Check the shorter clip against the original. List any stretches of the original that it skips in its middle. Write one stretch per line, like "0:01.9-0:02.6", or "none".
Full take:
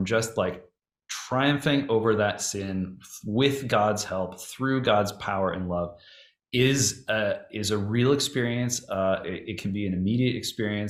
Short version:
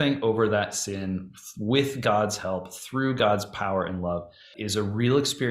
0:06.2-0:07.5